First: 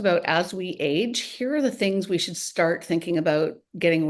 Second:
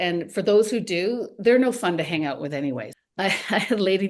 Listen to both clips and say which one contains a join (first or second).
second